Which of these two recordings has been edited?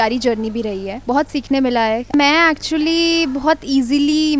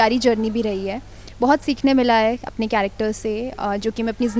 first; 2 cuts; at 0.9 s, 2.1 s

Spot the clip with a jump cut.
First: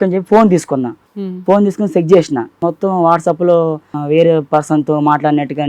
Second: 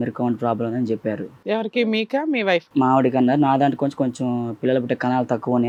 first; 3 cuts; at 1.0 s, 2.6 s, 3.9 s

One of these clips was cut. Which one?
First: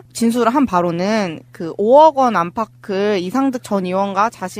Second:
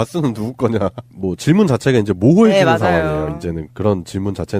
second; 1 cut; at 2.9 s

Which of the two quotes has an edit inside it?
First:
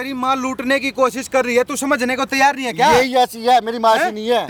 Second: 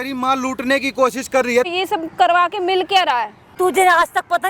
second; 2 cuts; at 1.7 s, 3.5 s

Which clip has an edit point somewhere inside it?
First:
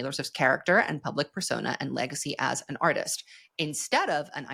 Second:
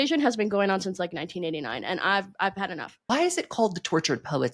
second; 1 cut; at 2.9 s

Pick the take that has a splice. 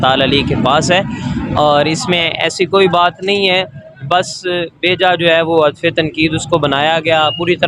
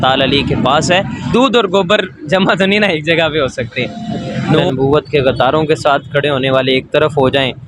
second; 2 cuts; at 1.2 s, 4.6 s

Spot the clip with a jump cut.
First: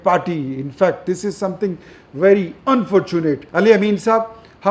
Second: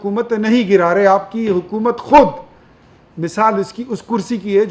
first; 1 cut; at 3.4 s

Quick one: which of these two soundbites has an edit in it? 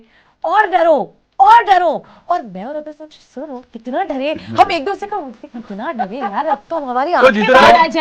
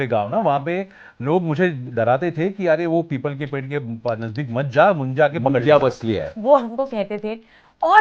second; 1 cut; at 6.4 s

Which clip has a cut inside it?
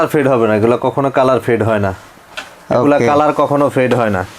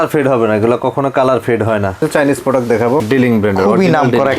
second; 2 cuts; at 2.0 s, 3.0 s

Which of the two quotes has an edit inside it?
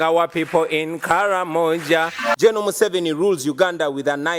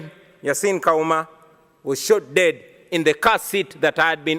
first; 1 cut; at 2.2 s

